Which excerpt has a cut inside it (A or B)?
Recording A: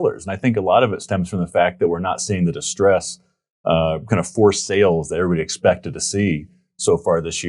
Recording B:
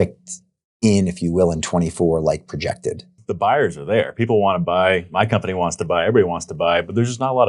B